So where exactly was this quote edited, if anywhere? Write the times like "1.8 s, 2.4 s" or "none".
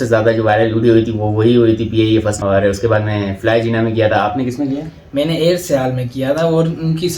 2.4 s